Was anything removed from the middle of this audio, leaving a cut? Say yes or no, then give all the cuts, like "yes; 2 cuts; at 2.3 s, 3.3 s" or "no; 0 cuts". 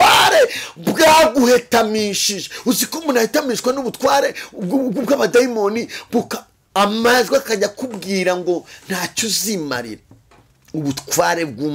no; 0 cuts